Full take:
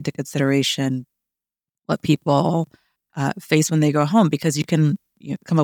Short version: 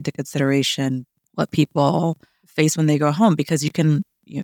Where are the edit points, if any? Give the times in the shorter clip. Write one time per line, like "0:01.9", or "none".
0:01.2
0:02.4

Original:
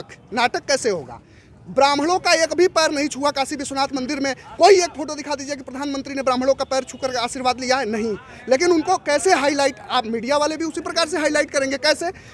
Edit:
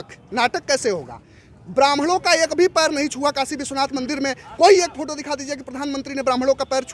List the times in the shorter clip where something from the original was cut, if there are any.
none

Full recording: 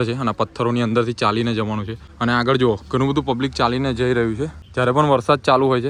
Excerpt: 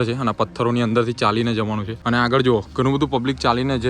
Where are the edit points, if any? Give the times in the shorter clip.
0:01.9

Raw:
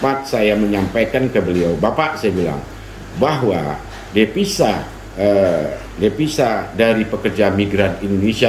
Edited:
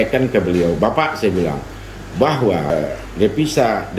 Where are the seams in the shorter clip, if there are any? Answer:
0:02.7

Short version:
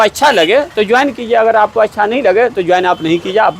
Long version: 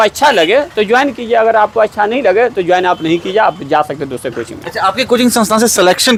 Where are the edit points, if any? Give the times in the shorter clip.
none

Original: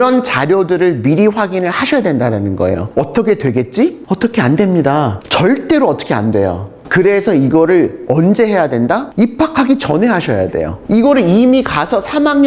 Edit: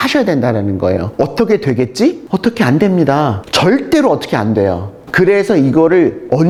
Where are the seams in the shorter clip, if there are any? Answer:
none

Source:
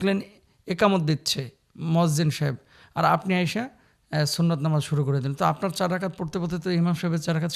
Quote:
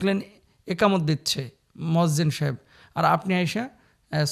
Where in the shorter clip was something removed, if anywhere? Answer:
none

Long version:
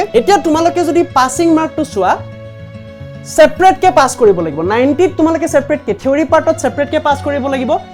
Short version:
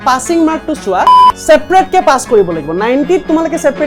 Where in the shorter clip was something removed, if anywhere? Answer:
0:01.3

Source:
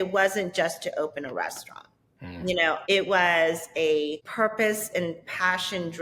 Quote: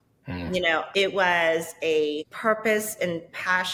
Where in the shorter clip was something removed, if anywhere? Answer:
none

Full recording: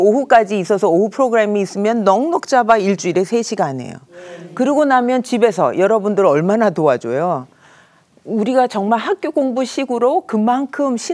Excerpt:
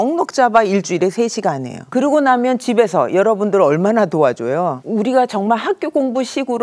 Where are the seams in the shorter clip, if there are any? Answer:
0:01.7
0:04.8

